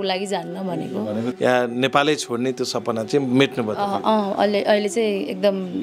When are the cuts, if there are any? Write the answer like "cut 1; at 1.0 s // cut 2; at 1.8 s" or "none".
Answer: cut 1; at 1.3 s